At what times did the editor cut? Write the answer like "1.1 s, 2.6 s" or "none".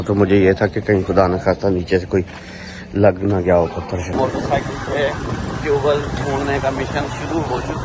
4.1 s